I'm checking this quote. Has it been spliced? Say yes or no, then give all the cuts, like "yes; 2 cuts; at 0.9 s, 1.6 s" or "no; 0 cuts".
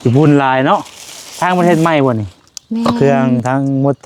yes; 1 cut; at 3.0 s